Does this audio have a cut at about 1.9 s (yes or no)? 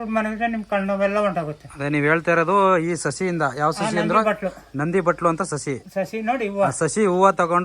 no